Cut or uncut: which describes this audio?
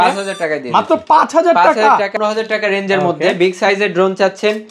cut